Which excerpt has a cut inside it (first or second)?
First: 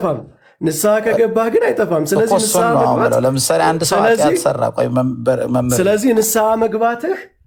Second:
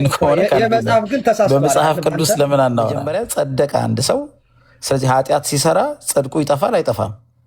second